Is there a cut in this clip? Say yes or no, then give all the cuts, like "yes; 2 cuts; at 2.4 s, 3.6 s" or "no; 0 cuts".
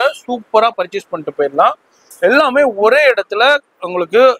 no; 0 cuts